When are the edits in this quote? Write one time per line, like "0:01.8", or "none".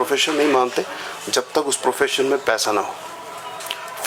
none